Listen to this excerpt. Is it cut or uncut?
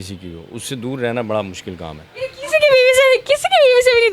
uncut